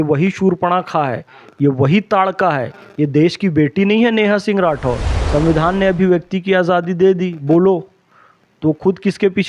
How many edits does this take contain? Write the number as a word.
one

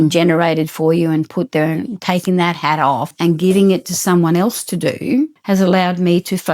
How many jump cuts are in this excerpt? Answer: two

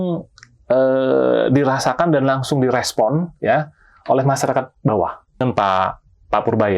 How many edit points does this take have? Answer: one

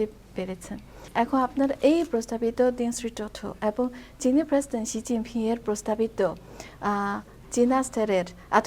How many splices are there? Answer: one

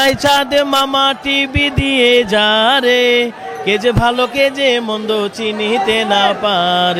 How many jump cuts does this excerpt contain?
zero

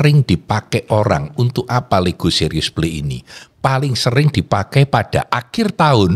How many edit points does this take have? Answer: zero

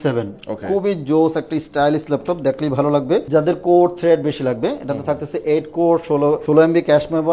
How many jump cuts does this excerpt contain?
two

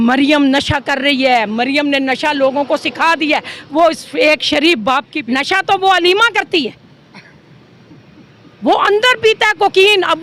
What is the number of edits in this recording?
one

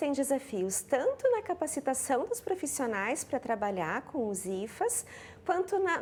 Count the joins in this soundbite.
zero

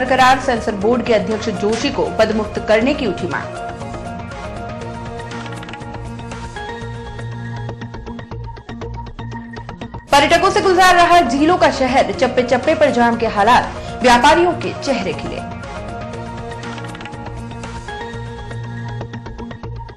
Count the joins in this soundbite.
zero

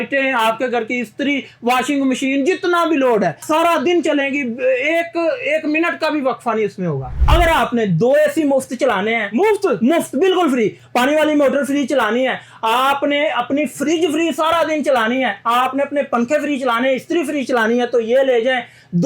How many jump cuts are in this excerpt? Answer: two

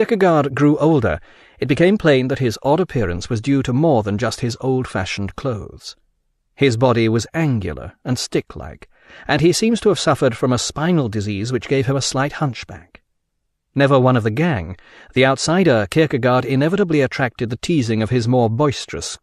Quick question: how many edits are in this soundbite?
one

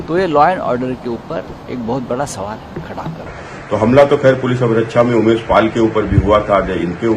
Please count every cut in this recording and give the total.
one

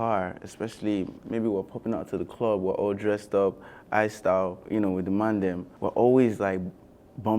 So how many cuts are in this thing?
two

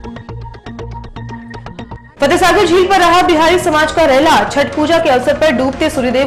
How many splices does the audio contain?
one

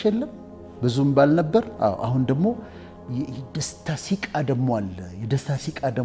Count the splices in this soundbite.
zero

